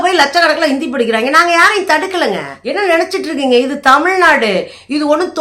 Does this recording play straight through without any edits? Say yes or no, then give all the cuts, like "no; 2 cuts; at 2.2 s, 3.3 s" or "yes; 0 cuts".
no; 1 cut; at 2.5 s